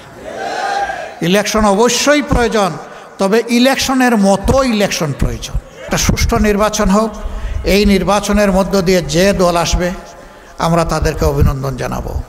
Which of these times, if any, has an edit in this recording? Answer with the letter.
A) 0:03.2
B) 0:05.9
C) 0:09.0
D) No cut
B